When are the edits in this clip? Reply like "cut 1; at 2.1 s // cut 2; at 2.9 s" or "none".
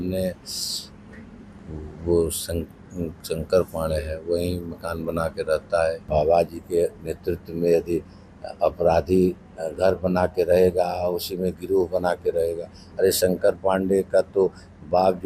cut 1; at 6.0 s